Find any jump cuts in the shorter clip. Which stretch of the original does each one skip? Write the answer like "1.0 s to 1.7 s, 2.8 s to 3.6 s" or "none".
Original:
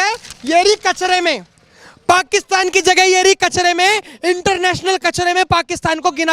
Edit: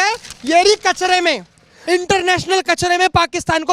1.7 s to 4.1 s